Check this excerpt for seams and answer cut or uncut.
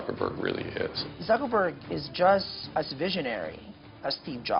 cut